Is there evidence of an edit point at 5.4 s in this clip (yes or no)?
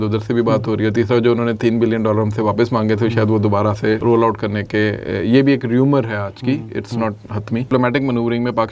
no